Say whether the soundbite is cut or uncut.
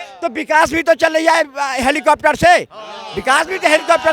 uncut